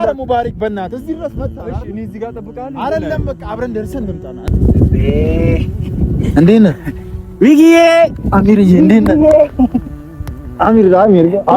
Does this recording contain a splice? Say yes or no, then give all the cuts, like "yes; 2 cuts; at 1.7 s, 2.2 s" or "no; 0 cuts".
yes; 1 cut; at 4.5 s